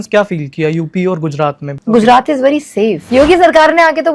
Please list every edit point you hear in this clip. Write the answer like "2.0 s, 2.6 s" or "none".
1.7 s, 3.0 s